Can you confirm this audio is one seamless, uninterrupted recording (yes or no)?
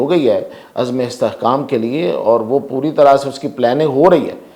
yes